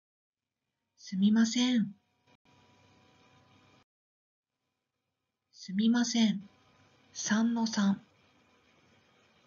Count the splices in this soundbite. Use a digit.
1